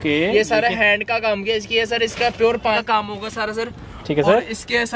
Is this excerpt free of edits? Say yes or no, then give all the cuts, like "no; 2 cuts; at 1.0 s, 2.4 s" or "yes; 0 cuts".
no; 1 cut; at 2.8 s